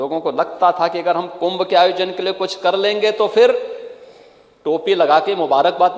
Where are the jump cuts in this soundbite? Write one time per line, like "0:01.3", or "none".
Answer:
none